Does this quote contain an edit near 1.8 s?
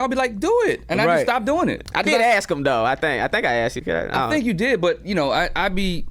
yes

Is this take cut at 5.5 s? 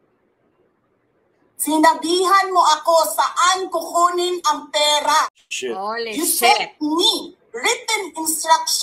yes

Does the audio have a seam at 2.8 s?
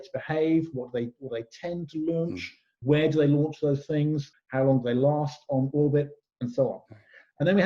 yes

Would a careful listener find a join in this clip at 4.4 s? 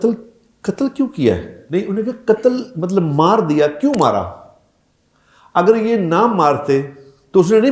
no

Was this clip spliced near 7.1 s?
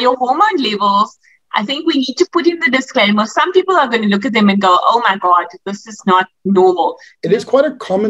yes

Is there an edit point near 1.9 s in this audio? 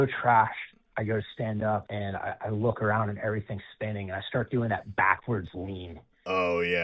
yes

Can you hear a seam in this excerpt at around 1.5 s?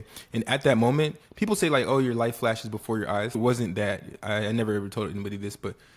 no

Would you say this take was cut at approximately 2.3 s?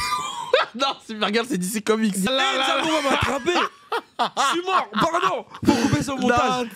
yes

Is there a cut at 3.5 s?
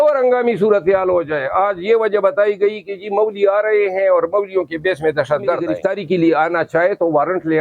no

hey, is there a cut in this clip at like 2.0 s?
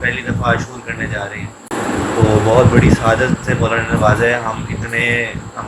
no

